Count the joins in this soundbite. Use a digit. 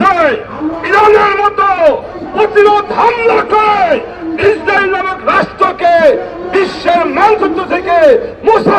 0